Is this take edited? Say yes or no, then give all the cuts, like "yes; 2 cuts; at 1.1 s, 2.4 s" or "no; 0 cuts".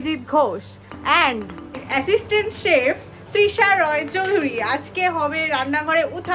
no; 0 cuts